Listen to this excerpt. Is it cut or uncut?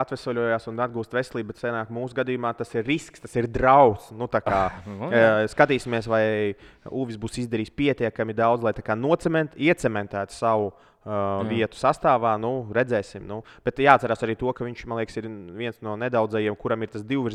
uncut